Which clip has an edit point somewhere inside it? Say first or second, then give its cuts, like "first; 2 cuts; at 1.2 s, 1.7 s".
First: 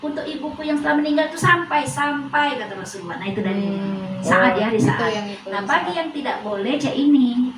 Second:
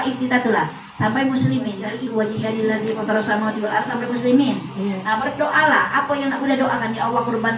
second; 1 cut; at 1.9 s